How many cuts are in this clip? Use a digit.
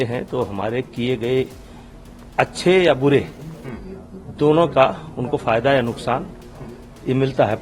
0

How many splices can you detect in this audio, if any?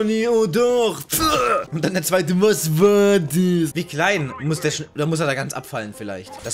1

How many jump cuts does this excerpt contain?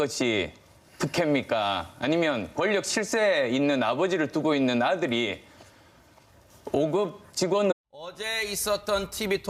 0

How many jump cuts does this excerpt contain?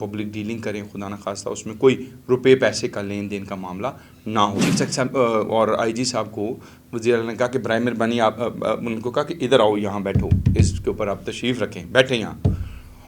1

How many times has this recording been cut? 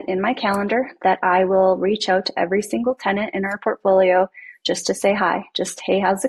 0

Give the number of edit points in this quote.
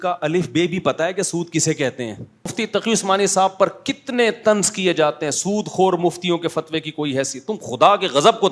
1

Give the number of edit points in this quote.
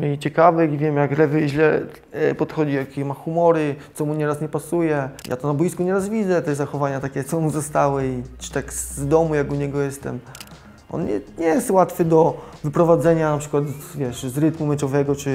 0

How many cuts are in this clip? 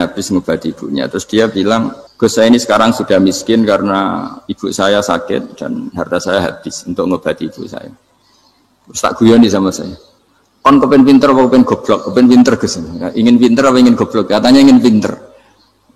1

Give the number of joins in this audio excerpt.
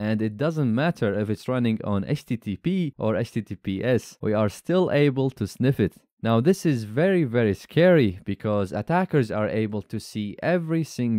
2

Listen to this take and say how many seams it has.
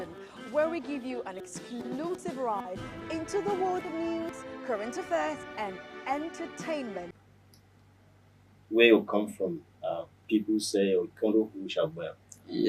1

